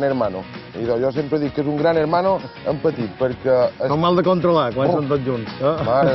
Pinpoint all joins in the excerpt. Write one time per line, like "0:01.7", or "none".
none